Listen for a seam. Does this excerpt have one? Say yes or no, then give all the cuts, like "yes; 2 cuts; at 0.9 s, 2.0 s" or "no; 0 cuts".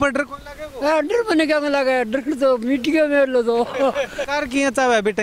yes; 1 cut; at 4.2 s